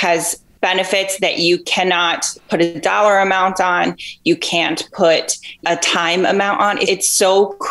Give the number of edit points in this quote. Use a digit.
2